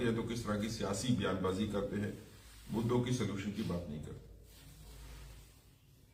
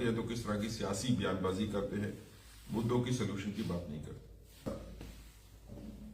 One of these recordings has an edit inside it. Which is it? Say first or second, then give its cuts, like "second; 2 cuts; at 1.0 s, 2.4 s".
second; 1 cut; at 4.7 s